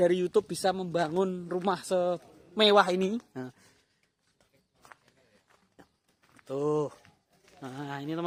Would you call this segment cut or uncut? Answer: uncut